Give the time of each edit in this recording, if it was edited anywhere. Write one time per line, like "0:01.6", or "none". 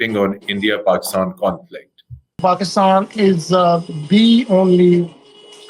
0:02.4